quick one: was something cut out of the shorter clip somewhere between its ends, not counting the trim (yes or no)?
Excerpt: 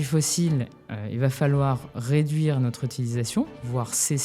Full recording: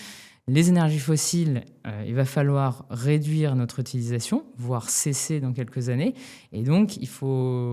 no